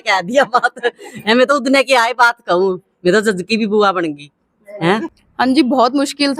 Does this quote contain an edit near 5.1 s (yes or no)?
yes